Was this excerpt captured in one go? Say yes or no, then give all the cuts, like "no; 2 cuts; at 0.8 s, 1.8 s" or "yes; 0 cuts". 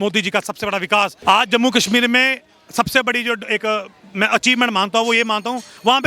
no; 1 cut; at 1.2 s